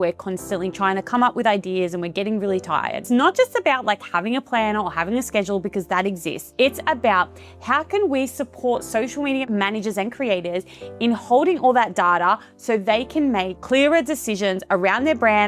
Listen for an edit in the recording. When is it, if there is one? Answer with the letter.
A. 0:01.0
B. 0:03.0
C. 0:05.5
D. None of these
B